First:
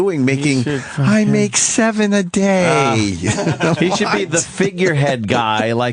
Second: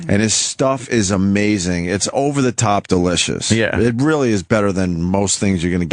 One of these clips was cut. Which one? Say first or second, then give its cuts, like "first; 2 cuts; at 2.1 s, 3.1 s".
first; 1 cut; at 3.3 s